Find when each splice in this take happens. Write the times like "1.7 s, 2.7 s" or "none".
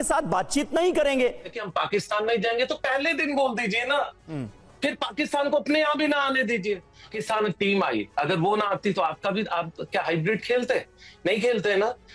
1.6 s, 7.1 s